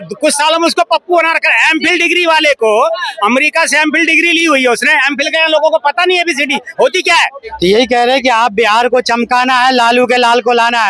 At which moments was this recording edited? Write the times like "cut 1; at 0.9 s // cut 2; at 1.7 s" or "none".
cut 1; at 7.5 s